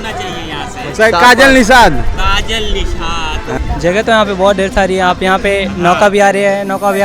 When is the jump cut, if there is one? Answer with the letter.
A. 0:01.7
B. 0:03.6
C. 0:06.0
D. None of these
B